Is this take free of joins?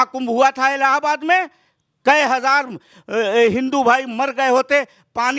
yes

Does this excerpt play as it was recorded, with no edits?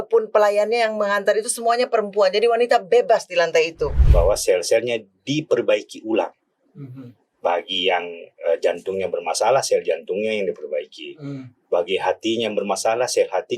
no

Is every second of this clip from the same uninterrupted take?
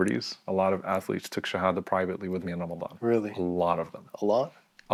yes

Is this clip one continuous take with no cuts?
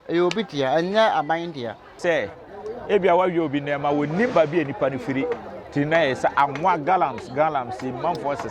no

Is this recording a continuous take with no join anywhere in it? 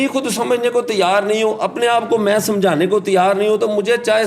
yes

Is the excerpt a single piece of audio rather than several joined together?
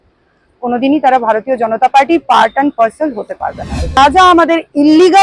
no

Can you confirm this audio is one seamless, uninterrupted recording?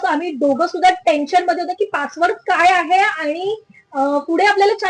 yes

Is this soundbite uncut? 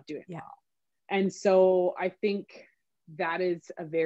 yes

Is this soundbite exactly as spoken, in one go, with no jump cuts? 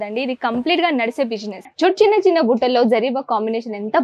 no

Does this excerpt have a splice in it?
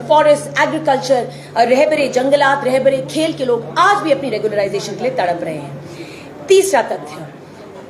yes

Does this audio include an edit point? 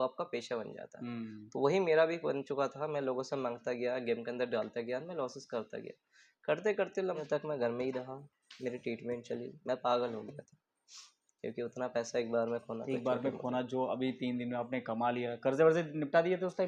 yes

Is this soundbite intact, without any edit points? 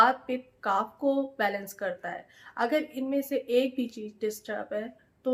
yes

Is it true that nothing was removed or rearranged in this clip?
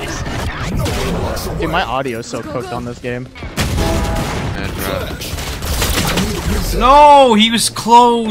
no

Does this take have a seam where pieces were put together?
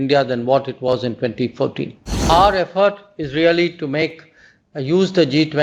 yes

